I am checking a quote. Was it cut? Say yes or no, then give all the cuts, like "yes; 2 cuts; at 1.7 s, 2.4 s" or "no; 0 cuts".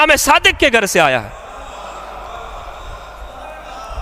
no; 0 cuts